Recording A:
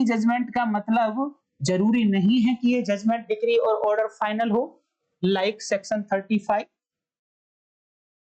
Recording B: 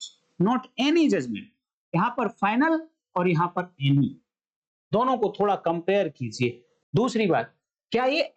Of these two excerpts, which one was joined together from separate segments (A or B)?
B